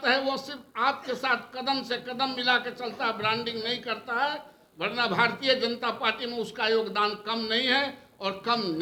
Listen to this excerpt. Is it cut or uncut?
uncut